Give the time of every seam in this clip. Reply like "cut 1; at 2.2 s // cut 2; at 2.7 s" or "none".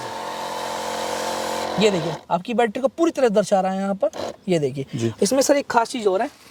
none